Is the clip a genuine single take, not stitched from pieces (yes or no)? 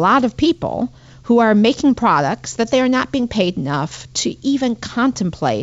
yes